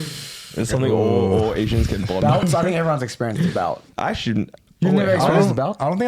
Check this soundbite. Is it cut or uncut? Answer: cut